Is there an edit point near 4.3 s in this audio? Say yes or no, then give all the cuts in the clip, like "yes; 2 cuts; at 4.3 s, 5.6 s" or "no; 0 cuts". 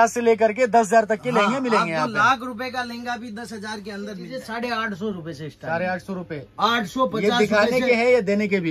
yes; 1 cut; at 4.3 s